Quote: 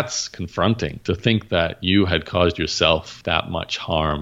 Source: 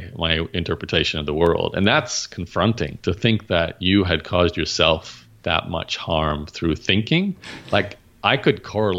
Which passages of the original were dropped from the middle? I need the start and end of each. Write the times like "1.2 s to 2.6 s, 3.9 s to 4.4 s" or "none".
5.1 s to 5.3 s